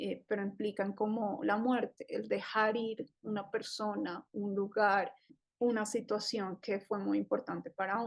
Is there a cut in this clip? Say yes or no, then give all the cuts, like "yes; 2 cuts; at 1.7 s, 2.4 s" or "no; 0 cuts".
yes; 1 cut; at 5.4 s